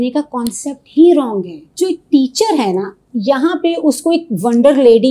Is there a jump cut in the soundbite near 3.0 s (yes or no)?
no